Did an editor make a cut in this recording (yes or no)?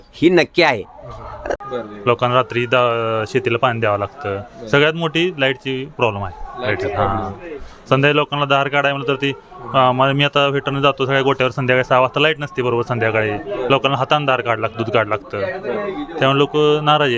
yes